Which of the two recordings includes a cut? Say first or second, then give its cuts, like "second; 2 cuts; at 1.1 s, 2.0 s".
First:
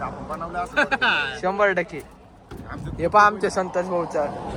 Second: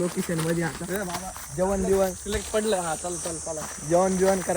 second; 1 cut; at 3.1 s